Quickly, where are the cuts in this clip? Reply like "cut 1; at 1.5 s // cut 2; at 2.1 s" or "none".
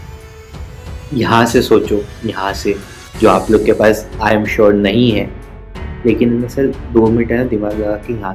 none